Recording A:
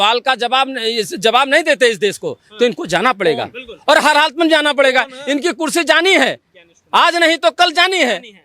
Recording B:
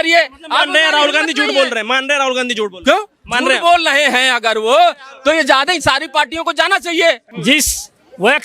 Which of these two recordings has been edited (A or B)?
B